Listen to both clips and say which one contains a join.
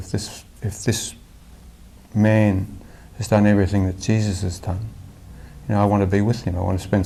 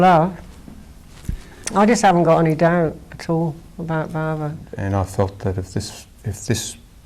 second; 1 cut; at 4.7 s

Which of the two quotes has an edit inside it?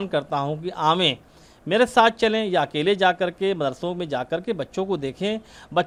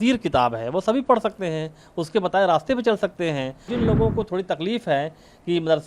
second; 1 cut; at 3.6 s

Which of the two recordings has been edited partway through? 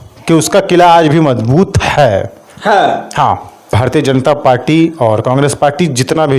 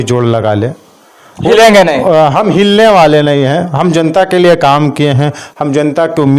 first; 1 cut; at 3.6 s

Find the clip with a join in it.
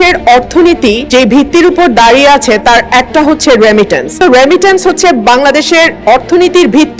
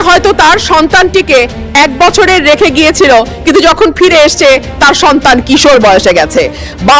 first; 2 cuts; at 1.0 s, 4.2 s

